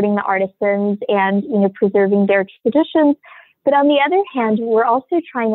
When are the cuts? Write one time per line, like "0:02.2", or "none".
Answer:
none